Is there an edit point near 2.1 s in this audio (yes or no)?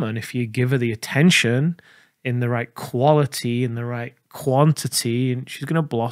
no